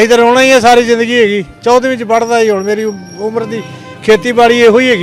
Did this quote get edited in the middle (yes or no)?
no